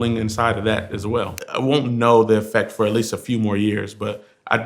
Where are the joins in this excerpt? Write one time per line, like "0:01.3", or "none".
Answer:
0:01.4

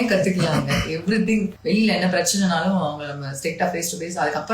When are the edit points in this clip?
0:01.6

